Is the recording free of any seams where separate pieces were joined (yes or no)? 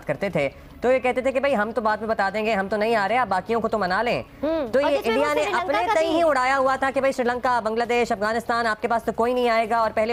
yes